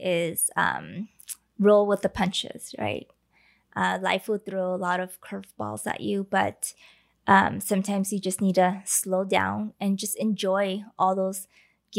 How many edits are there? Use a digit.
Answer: 0